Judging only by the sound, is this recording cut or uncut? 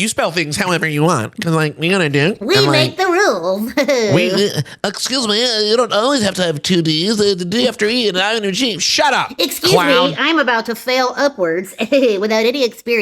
uncut